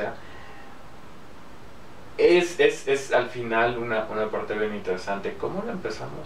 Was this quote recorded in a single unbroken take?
yes; 0 cuts

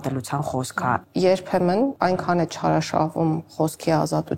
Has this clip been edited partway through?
yes; 2 cuts; at 1.0 s, 1.9 s

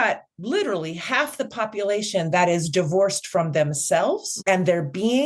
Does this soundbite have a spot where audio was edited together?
yes; 1 cut; at 4.3 s

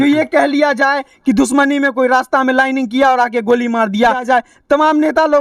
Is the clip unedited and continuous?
no; 1 cut; at 4.2 s

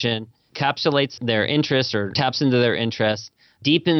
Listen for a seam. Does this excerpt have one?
yes; 2 cuts; at 1.2 s, 2.1 s

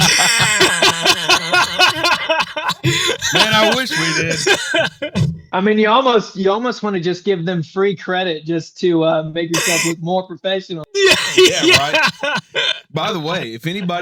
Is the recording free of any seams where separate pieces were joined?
yes; 0 cuts

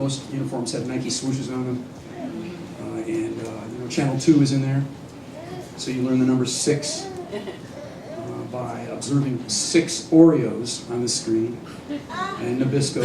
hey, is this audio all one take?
no; 1 cut; at 5.4 s

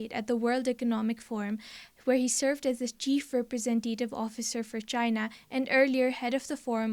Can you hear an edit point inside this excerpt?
no; 0 cuts

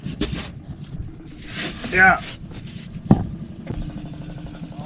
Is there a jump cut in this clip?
yes; 1 cut; at 3.8 s

